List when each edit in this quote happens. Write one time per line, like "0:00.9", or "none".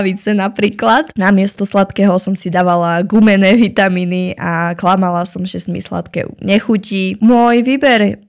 none